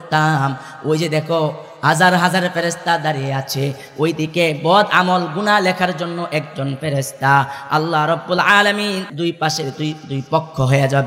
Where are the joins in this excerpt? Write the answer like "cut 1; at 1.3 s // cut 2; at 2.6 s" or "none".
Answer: cut 1; at 9.1 s